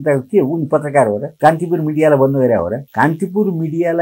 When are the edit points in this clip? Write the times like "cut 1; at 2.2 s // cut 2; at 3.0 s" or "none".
cut 1; at 1.3 s // cut 2; at 2.8 s